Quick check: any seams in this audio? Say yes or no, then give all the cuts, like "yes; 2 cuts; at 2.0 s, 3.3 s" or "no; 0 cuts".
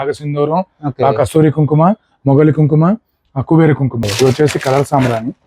yes; 1 cut; at 4.1 s